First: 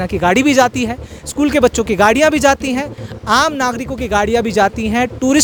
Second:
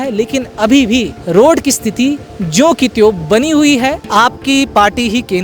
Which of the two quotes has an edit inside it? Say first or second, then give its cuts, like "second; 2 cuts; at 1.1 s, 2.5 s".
second; 2 cuts; at 1.2 s, 4.0 s